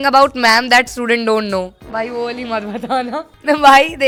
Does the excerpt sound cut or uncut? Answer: uncut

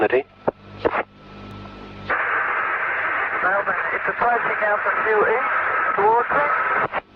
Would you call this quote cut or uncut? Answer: cut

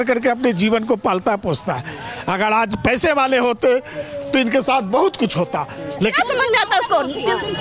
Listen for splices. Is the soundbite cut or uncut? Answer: cut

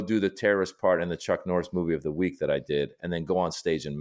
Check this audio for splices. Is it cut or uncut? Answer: uncut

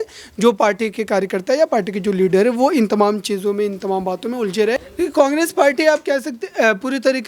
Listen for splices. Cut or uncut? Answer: cut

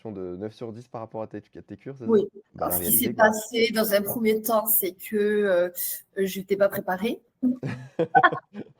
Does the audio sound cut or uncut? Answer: cut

